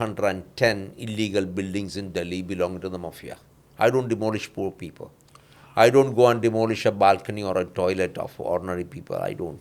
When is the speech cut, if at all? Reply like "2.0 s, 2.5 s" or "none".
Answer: none